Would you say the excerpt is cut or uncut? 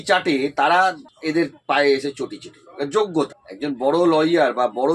cut